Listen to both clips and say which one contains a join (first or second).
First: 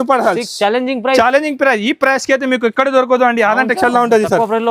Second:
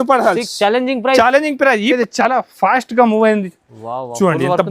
second